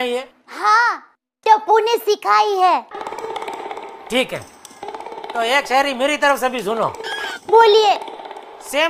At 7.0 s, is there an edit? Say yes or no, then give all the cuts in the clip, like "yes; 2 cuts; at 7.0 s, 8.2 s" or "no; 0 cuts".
no; 0 cuts